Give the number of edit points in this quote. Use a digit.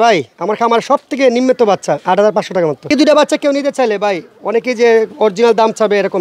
1